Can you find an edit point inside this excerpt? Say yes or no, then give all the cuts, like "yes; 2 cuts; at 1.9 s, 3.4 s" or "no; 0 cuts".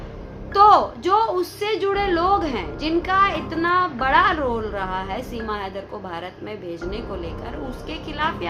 no; 0 cuts